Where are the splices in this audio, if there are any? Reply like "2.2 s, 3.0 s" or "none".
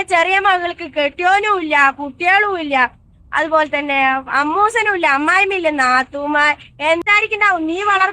7.0 s